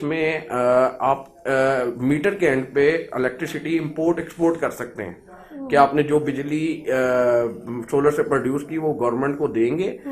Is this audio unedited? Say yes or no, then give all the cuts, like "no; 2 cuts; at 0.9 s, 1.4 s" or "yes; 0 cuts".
yes; 0 cuts